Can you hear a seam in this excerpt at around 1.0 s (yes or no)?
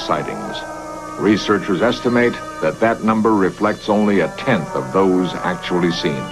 no